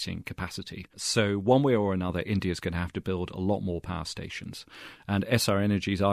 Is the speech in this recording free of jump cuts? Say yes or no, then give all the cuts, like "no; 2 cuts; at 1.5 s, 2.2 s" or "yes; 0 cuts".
yes; 0 cuts